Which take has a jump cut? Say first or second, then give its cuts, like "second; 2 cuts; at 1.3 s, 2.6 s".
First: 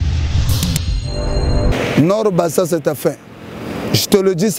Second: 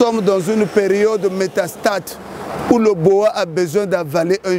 first; 1 cut; at 1.7 s